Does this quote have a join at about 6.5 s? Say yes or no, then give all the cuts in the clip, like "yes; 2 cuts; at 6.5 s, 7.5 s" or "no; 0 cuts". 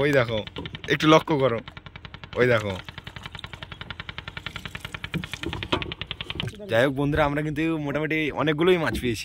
yes; 1 cut; at 6.5 s